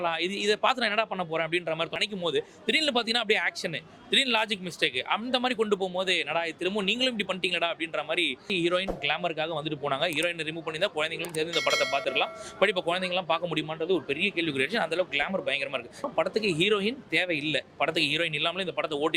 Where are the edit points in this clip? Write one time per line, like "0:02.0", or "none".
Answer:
0:02.0
0:08.5
0:16.1